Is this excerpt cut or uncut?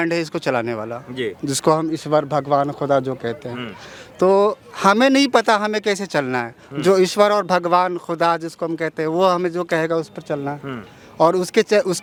uncut